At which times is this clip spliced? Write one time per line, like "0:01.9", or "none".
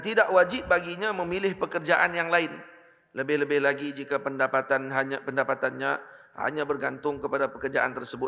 none